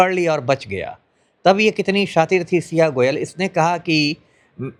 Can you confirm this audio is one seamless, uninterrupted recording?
yes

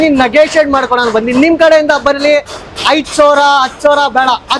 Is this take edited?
no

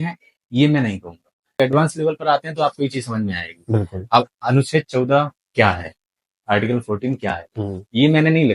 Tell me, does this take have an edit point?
yes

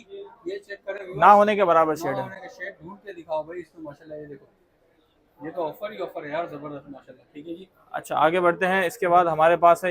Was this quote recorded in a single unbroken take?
yes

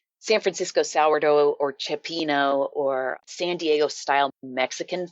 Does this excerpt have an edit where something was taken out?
yes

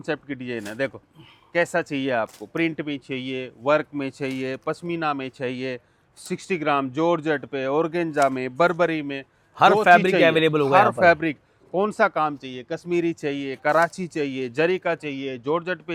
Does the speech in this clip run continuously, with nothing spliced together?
yes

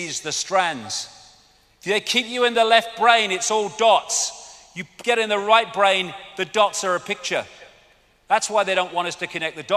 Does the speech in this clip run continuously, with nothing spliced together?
yes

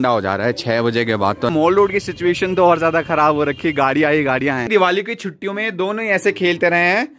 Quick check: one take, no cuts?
no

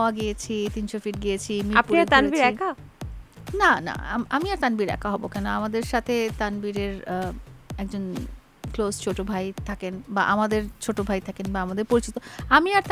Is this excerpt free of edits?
yes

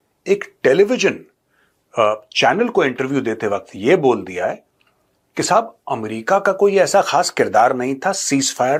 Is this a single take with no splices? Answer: yes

